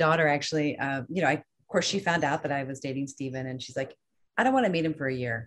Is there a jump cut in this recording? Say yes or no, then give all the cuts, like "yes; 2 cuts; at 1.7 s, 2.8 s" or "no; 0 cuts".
no; 0 cuts